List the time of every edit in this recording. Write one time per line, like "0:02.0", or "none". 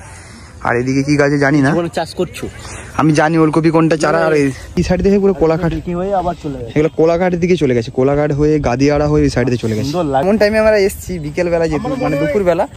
0:04.8
0:10.2